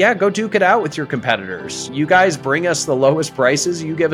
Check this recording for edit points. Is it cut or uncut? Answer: uncut